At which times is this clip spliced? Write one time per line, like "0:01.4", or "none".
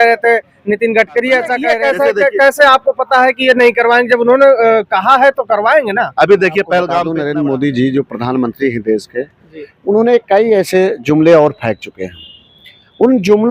0:01.7
0:07.1